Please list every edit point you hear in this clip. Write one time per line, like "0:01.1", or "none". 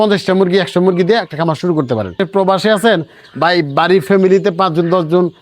0:02.2